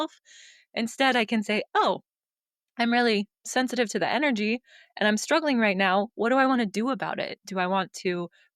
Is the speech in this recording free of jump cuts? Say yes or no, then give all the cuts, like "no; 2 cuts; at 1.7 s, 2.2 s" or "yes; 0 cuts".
yes; 0 cuts